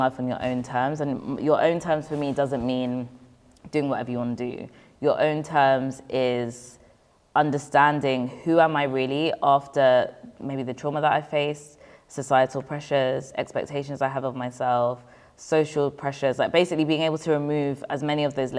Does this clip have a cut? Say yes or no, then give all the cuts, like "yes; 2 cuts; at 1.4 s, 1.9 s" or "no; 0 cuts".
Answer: no; 0 cuts